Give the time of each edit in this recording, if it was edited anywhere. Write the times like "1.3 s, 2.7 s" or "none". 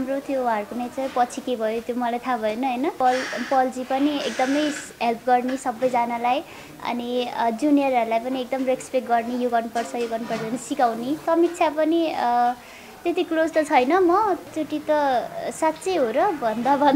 3.0 s, 11.2 s, 14.5 s